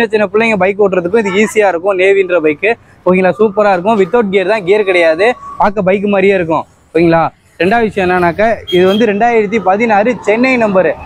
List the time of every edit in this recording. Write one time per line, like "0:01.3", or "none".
none